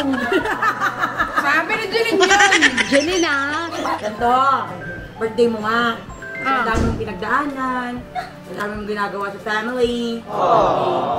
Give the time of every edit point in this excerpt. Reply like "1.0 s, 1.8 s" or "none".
4.0 s, 10.2 s